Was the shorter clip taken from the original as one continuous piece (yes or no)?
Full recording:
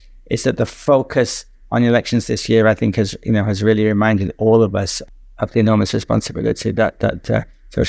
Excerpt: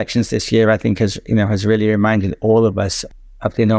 yes